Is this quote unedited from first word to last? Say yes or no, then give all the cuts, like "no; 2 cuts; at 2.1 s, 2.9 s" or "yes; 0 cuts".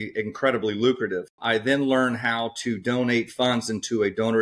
no; 1 cut; at 1.3 s